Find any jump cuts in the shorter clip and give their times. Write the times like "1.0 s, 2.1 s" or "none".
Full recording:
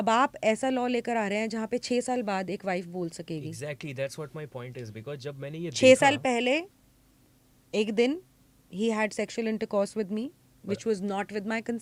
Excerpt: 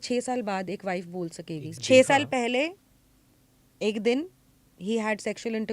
1.8 s